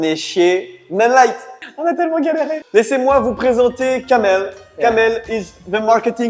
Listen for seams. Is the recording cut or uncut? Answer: cut